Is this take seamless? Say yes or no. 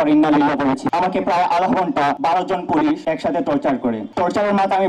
no